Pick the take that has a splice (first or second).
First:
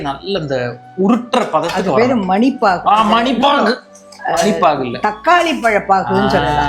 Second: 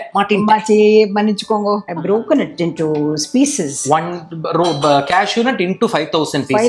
second